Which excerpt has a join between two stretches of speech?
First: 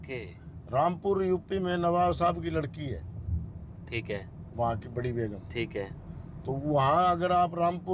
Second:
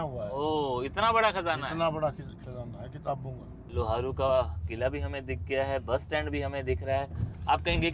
second; 1 cut; at 3.6 s

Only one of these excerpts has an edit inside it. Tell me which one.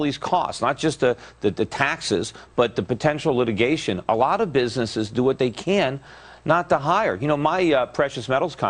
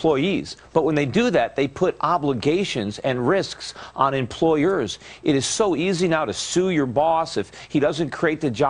second; 1 cut; at 5.8 s

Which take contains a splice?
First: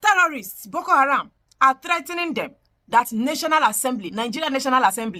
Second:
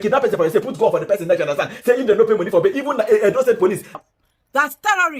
second; 1 cut; at 3.9 s

